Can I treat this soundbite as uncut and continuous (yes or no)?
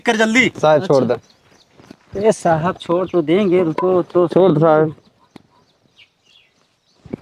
yes